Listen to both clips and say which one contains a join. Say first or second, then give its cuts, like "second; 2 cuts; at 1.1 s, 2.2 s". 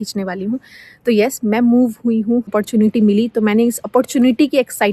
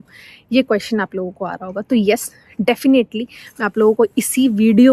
first; 1 cut; at 2.5 s